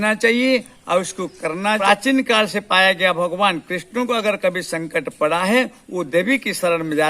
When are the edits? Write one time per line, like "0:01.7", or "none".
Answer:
0:01.8